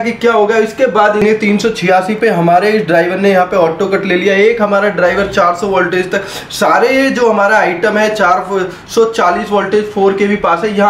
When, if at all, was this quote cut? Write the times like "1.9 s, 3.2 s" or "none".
1.2 s